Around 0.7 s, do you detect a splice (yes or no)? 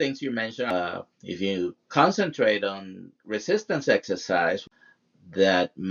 yes